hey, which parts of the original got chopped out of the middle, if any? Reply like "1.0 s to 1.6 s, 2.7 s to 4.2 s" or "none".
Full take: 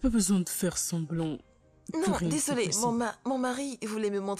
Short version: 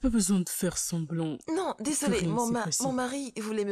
1.4 s to 1.9 s